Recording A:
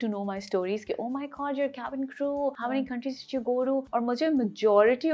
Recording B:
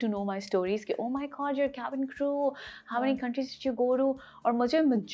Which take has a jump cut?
A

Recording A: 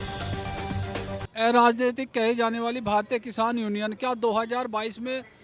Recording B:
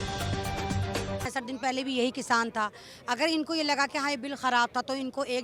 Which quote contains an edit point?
A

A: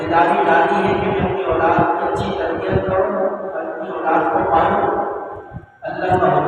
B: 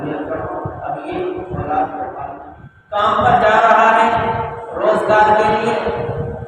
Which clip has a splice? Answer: B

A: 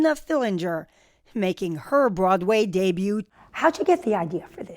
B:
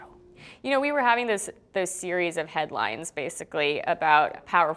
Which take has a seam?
A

